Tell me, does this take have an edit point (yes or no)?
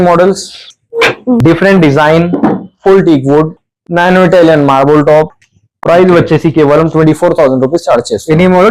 no